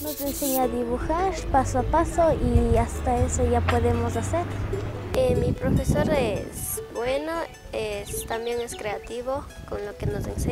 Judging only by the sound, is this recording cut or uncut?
uncut